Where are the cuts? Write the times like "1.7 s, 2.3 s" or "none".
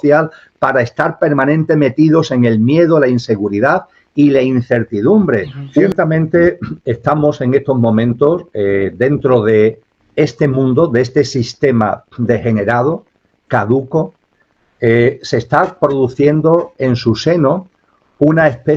5.9 s